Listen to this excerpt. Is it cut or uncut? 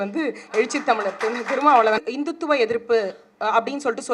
cut